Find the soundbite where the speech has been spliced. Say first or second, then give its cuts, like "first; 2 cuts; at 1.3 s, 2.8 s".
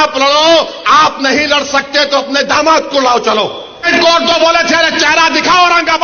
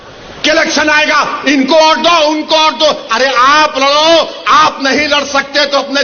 first; 1 cut; at 3.9 s